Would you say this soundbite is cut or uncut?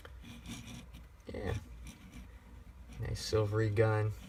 uncut